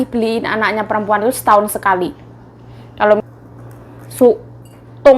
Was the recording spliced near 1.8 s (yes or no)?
no